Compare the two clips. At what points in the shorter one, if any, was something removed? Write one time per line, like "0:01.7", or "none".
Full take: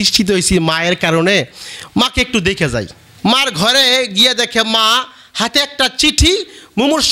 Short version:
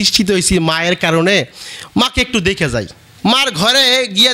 none